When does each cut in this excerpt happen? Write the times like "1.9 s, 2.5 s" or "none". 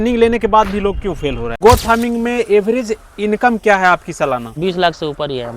1.5 s, 4.5 s